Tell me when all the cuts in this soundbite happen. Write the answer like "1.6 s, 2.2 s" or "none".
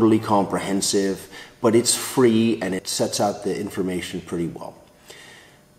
2.9 s